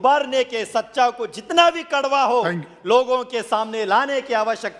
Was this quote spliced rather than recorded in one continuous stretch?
no; 0 cuts

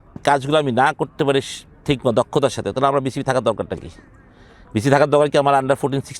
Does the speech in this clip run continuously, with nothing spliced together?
yes; 0 cuts

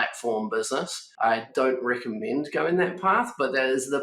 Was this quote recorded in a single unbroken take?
no; 1 cut; at 1.0 s

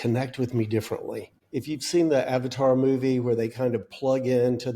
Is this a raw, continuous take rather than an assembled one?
no; 1 cut; at 1.3 s

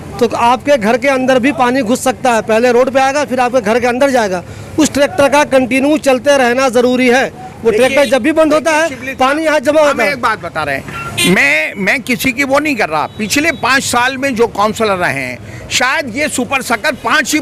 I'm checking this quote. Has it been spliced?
no; 0 cuts

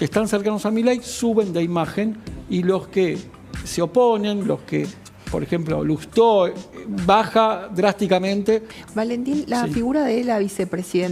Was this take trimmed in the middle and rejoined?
yes; 1 cut; at 8.8 s

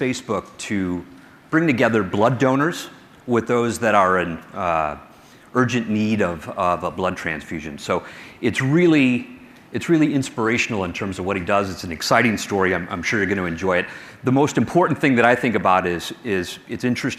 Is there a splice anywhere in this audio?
no; 0 cuts

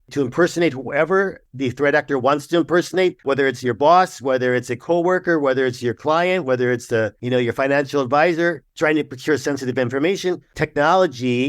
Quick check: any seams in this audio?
yes; 5 cuts; at 1.5 s, 3.2 s, 7.2 s, 8.7 s, 10.5 s

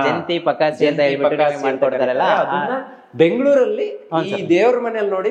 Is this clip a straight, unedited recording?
yes; 0 cuts

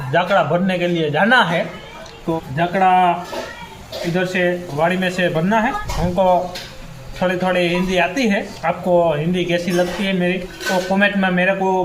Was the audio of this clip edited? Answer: yes; 4 cuts; at 2.4 s, 5.9 s, 8.5 s, 10.5 s

